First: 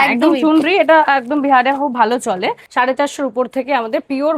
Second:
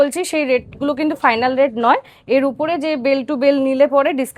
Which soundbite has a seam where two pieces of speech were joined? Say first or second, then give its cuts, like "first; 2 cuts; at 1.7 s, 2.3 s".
first; 1 cut; at 2.6 s